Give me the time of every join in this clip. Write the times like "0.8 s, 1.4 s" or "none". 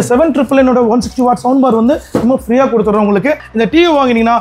3.4 s

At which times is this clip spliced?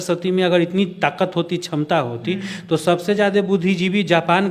none

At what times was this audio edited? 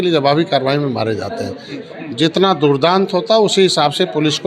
1.8 s

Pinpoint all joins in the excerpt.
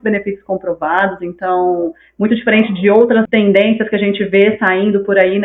3.3 s

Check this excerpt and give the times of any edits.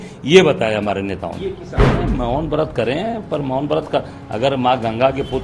1.7 s

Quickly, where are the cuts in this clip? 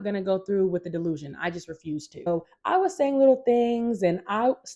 2.3 s

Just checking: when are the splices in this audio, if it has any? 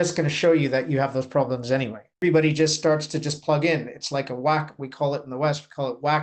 2.2 s

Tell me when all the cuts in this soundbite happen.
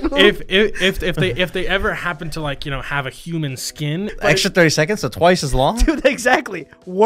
4.1 s

